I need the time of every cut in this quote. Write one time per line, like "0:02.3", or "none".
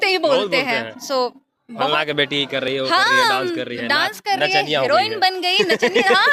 none